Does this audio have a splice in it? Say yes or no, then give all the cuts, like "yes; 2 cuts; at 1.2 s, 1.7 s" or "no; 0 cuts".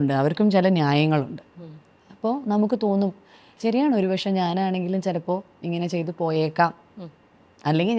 no; 0 cuts